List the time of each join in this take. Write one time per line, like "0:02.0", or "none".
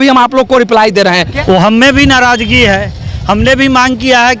0:01.3